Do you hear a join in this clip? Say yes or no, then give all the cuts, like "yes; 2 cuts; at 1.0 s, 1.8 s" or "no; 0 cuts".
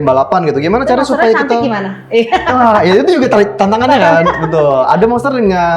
no; 0 cuts